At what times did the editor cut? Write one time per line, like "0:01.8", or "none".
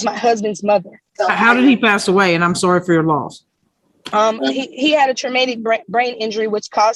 none